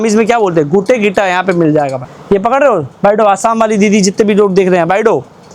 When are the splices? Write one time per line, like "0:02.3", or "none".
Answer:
0:02.1